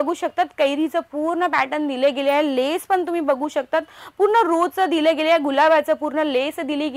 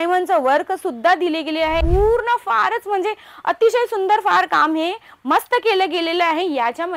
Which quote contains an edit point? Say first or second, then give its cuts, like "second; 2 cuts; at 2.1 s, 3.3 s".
second; 1 cut; at 1.8 s